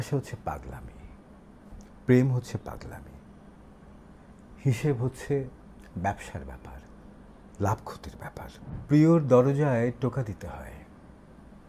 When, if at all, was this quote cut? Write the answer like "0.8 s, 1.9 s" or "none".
8.7 s